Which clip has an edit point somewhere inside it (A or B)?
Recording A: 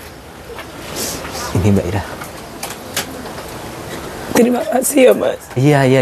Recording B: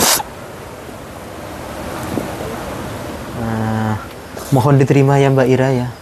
B